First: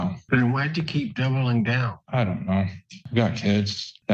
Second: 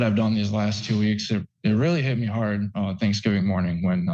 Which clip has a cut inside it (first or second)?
first